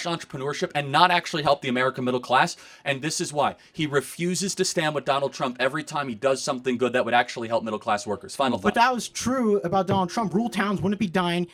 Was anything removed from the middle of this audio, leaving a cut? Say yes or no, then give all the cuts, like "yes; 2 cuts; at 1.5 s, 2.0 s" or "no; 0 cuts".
no; 0 cuts